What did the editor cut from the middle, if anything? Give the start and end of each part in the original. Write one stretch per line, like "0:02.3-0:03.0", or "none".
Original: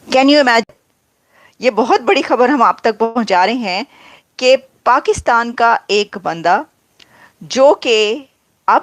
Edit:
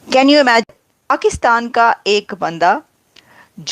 0:01.1-0:04.9